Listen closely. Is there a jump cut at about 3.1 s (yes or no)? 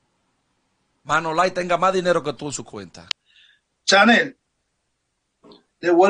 yes